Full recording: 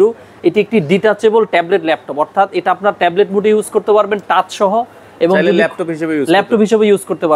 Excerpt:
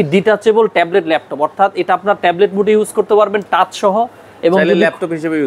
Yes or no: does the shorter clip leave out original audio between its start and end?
no